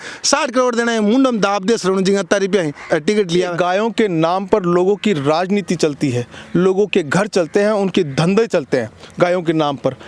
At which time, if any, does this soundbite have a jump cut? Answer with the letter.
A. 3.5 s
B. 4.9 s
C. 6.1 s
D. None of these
A